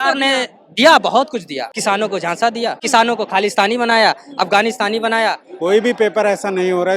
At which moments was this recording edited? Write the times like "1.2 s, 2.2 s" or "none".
1.7 s, 2.8 s, 5.5 s